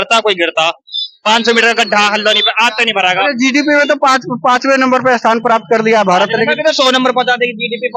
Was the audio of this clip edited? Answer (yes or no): no